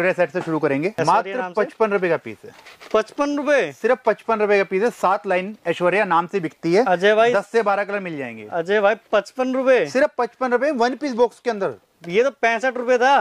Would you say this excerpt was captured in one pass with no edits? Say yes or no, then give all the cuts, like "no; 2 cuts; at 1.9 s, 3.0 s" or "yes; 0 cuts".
no; 1 cut; at 0.9 s